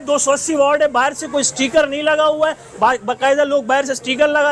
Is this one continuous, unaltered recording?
yes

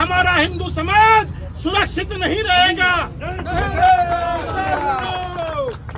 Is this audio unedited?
yes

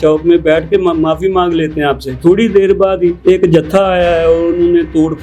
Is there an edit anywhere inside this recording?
yes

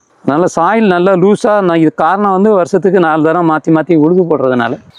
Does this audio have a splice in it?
no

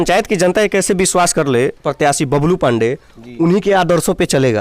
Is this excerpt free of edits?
no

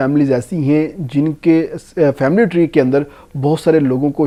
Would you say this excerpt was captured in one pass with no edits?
yes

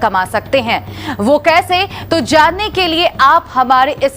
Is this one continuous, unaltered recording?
no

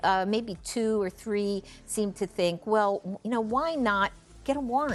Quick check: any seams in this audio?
no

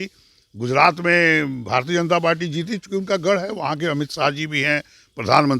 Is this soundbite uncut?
yes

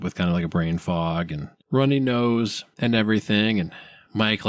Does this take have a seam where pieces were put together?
yes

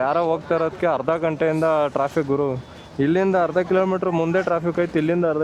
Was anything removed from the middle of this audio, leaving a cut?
no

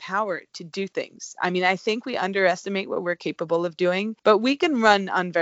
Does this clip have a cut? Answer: yes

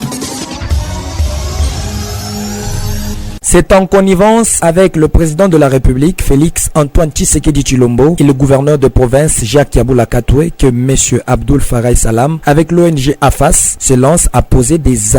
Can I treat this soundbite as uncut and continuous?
no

